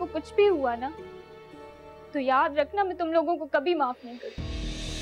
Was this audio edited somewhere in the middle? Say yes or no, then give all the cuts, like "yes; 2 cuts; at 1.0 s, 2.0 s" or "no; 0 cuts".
no; 0 cuts